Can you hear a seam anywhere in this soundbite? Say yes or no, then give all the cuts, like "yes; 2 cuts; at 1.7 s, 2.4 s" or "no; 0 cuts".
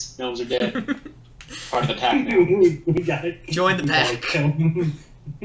no; 0 cuts